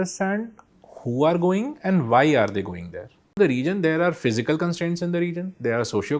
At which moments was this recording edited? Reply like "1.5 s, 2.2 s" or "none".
3.4 s